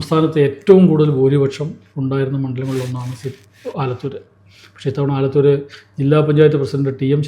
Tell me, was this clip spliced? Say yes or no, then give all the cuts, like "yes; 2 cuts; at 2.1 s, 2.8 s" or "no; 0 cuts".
no; 0 cuts